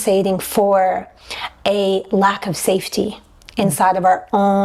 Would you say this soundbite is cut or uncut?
uncut